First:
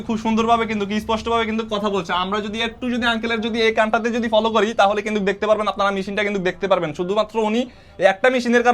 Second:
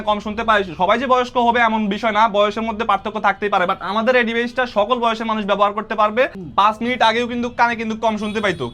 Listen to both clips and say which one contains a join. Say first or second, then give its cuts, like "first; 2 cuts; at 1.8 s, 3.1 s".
second; 1 cut; at 6.4 s